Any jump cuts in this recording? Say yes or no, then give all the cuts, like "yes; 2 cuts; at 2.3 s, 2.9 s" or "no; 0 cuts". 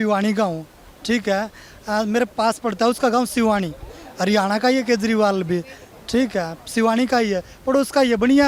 no; 0 cuts